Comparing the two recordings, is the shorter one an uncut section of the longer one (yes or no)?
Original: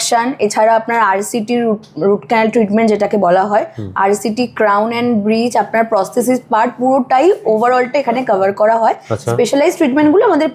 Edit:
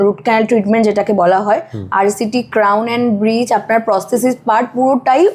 yes